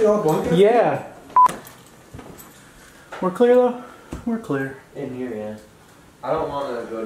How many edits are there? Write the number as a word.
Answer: one